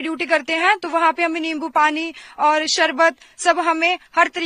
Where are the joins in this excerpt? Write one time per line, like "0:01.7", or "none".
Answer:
none

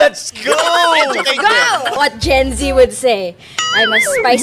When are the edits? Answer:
0:02.0

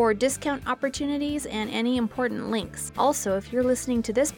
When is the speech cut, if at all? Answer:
none

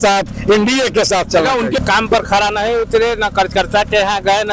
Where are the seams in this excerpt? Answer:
0:01.8

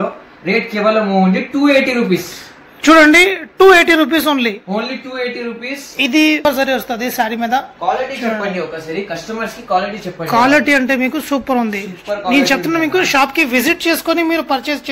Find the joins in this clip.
0:06.4

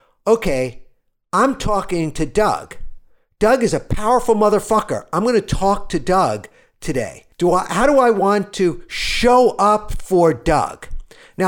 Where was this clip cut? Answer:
0:07.2

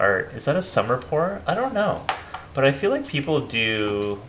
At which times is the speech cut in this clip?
none

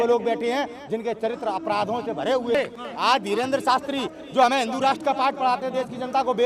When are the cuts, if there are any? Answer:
0:02.5

